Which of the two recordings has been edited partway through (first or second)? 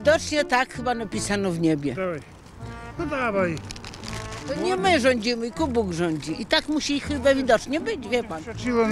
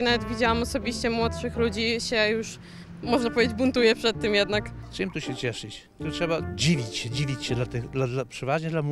second